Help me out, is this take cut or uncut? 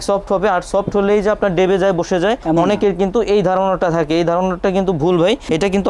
uncut